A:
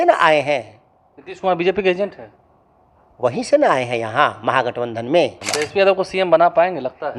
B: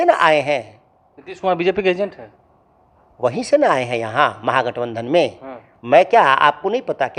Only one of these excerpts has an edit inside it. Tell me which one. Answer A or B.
A